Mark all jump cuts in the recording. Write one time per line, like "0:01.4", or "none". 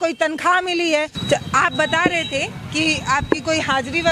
none